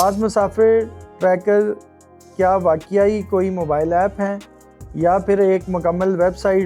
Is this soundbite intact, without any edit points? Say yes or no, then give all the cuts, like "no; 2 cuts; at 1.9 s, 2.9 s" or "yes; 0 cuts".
yes; 0 cuts